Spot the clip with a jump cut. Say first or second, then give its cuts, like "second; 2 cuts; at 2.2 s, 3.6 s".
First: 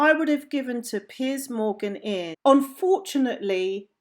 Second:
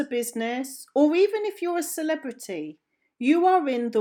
first; 1 cut; at 2.3 s